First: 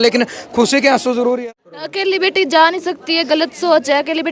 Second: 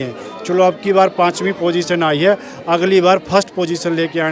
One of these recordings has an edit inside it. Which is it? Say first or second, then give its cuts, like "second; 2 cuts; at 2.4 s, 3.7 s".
first; 1 cut; at 1.4 s